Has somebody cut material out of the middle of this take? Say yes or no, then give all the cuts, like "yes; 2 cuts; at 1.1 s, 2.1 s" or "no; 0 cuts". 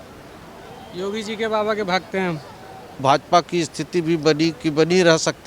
yes; 1 cut; at 3.0 s